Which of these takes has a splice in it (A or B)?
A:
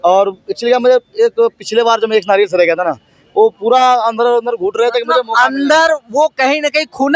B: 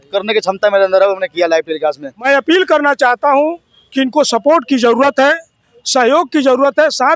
B